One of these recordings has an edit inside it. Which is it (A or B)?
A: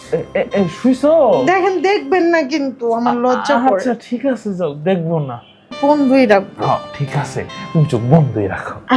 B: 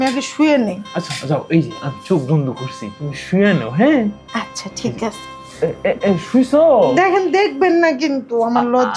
A